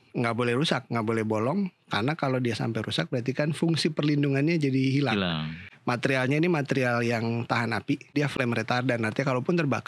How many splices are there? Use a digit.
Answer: 1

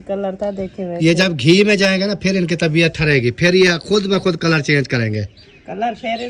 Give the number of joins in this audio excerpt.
0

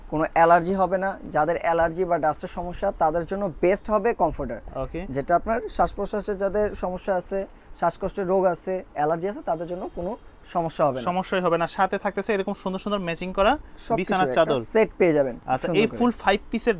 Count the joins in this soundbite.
0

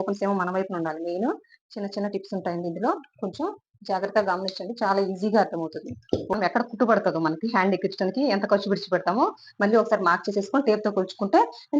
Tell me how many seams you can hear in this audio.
1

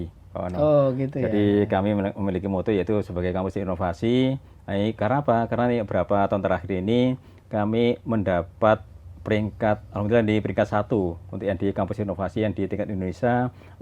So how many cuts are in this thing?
0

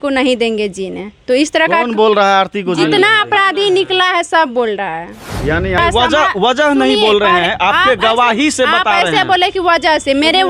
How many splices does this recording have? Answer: 1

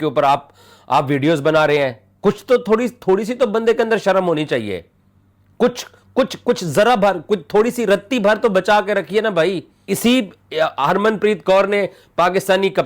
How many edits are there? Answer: 1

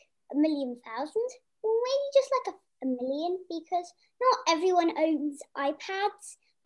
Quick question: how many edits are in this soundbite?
2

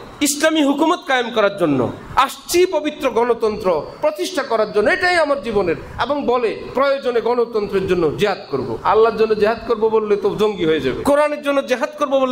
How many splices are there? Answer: 2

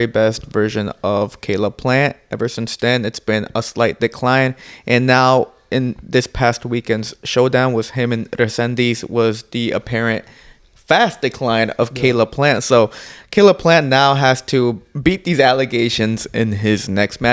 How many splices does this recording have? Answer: 0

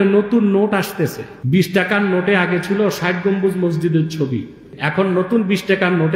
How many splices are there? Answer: 2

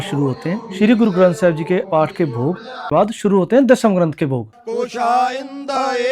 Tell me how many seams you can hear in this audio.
2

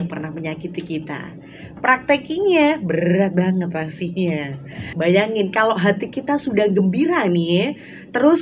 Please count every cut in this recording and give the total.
1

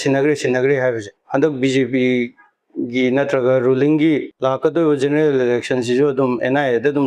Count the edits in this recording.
2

